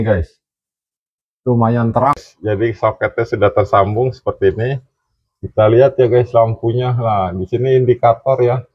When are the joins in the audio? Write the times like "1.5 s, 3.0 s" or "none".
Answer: 2.2 s